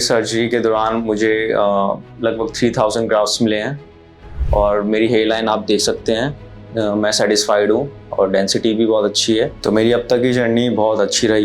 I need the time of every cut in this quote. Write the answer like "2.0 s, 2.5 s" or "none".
9.5 s